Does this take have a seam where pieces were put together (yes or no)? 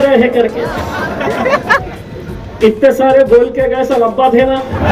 no